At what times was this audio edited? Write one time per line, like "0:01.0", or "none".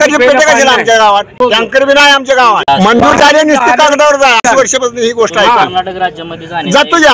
0:01.3
0:02.7
0:04.4